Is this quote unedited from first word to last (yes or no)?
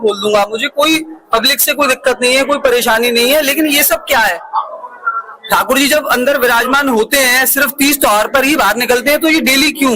no